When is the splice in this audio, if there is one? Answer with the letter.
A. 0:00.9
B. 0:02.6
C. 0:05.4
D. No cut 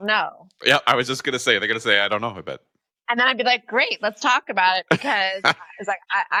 D